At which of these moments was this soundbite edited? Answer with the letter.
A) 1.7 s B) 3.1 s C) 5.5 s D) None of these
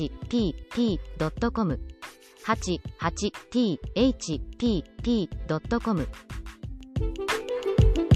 A